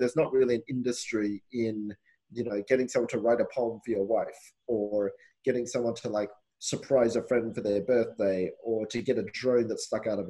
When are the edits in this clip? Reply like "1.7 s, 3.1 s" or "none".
5.3 s